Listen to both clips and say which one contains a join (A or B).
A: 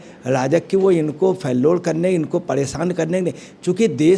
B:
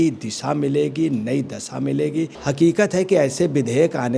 B